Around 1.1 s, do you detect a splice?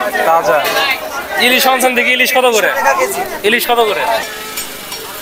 no; 1 cut; at 4.3 s

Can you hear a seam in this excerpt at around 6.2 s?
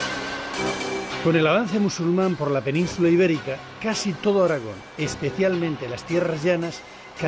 no; 0 cuts

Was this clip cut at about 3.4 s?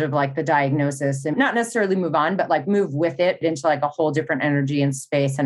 yes; 2 cuts; at 1.3 s, 3.4 s

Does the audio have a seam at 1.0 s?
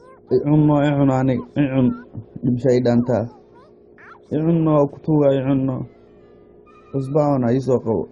no; 1 cut; at 2.6 s

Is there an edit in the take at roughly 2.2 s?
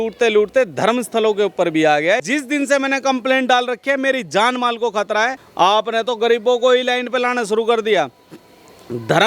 yes; 2 cuts; at 2.2 s, 5.4 s

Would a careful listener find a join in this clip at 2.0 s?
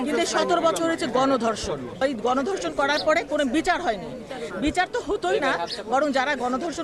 yes; 1 cut; at 2.0 s

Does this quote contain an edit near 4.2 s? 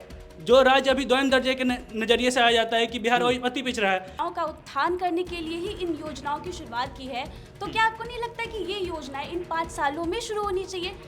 yes; 1 cut; at 4.2 s

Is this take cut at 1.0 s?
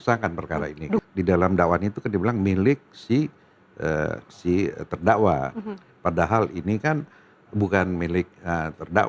yes; 1 cut; at 1.0 s

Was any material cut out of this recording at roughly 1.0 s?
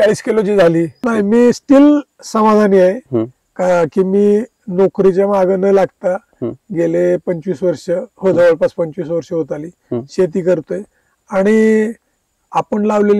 yes; 1 cut; at 1.0 s

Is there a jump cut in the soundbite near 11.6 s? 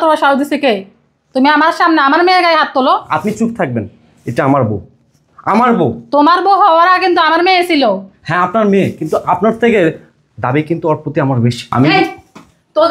yes; 1 cut; at 11.6 s

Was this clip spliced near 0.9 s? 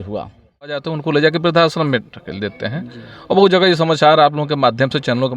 yes; 1 cut; at 0.9 s

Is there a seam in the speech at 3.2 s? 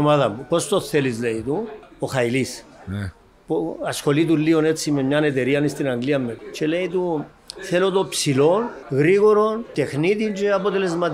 no; 4 cuts; at 1.8 s, 6.4 s, 8.8 s, 9.7 s

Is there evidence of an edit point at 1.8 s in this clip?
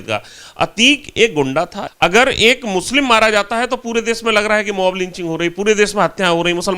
yes; 1 cut; at 1.8 s

